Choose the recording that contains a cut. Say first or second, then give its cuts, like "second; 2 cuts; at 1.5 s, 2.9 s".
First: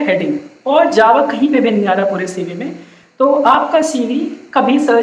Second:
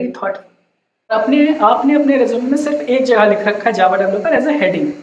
second; 1 cut; at 1.1 s